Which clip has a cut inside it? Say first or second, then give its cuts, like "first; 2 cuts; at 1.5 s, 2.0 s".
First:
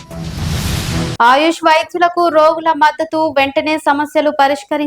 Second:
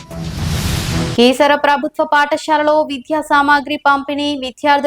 first; 1 cut; at 1.1 s